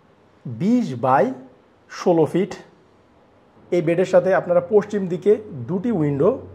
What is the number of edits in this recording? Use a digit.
0